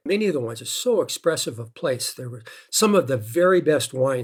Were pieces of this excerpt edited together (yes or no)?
no